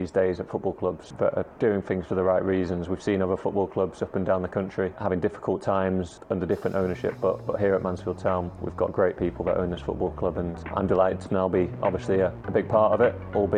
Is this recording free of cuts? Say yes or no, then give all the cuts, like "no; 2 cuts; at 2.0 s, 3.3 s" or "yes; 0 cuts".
no; 6 cuts; at 1.1 s, 5.0 s, 6.2 s, 8.6 s, 10.5 s, 12.4 s